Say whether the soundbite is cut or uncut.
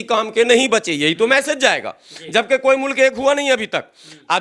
uncut